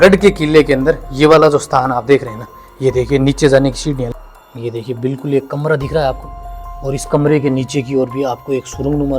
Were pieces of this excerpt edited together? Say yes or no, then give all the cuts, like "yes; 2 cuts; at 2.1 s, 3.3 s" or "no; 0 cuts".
yes; 1 cut; at 4.1 s